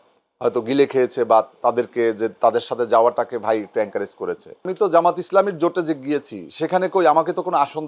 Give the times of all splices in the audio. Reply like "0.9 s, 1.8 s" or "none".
4.7 s

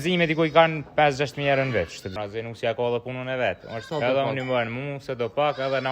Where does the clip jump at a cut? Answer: 2.1 s, 3.8 s

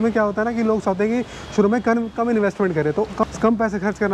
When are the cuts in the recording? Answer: 3.2 s

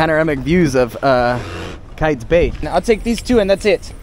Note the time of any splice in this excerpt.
2.6 s

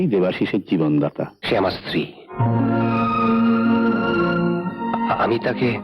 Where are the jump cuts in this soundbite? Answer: 1.4 s

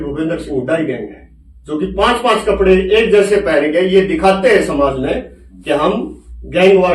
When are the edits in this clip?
none

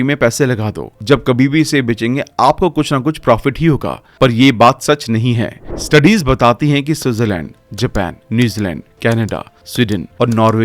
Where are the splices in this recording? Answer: 5.6 s

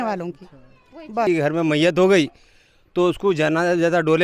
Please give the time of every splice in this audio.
1.3 s

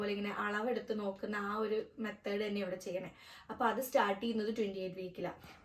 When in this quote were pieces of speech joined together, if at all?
none

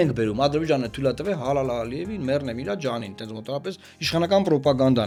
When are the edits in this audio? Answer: none

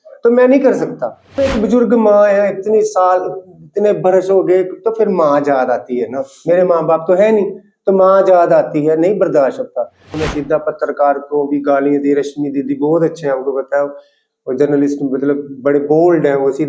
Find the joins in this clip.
1.4 s, 10.2 s

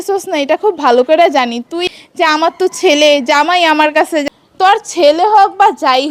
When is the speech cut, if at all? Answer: 1.8 s, 4.2 s

